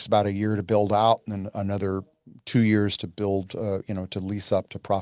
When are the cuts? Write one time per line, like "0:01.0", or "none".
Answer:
none